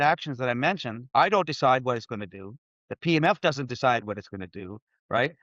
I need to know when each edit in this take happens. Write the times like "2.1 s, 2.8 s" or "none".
0.9 s